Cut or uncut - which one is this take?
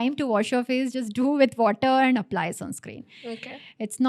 uncut